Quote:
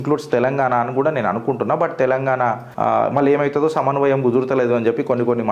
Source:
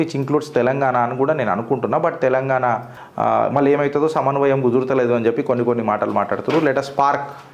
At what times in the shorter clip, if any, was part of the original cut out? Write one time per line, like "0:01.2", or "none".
0:02.7

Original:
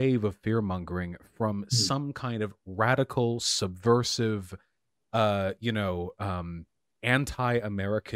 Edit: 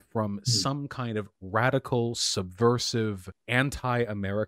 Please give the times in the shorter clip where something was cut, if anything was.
0:03.3

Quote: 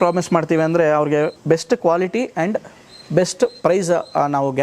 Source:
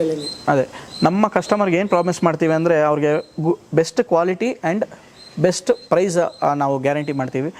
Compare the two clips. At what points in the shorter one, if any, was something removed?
0:01.4

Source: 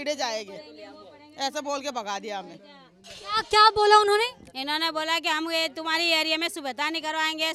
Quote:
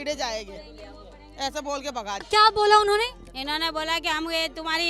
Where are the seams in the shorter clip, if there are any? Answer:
0:02.3

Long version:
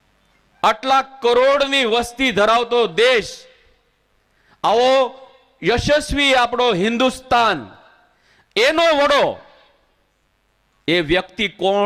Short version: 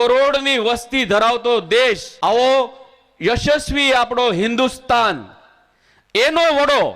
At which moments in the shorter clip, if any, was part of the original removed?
0:02.1

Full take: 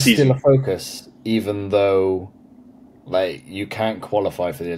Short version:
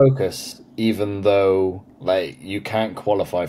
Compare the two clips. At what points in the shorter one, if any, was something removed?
0:01.9

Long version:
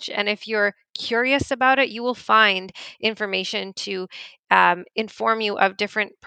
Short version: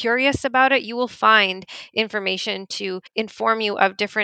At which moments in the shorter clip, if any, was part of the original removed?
0:03.1

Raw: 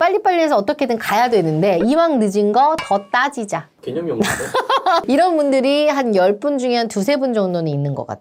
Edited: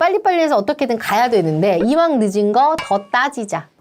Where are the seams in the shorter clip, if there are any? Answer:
none

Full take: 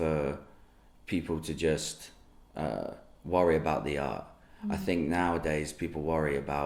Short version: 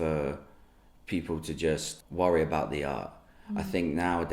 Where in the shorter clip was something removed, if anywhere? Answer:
0:02.0

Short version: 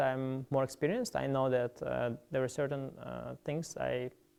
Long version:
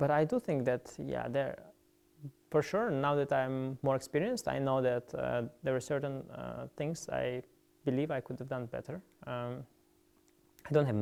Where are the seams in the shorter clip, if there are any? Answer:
none

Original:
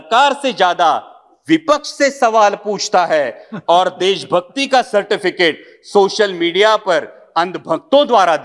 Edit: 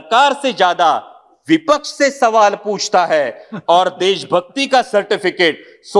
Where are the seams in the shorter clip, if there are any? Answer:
none

